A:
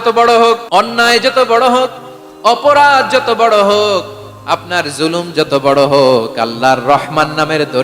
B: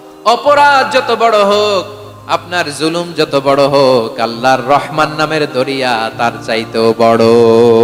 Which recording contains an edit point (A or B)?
A